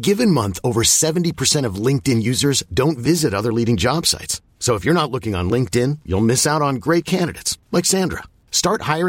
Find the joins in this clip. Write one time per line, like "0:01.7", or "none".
none